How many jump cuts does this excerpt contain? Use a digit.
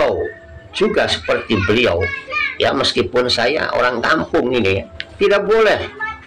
1